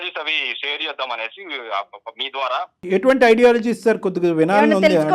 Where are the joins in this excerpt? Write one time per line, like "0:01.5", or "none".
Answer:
0:02.8